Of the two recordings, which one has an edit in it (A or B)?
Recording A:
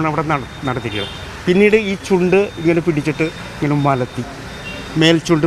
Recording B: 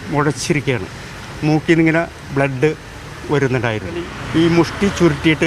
B